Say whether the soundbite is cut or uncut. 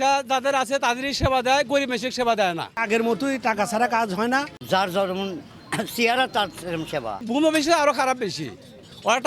cut